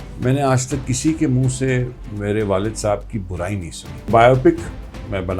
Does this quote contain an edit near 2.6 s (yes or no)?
no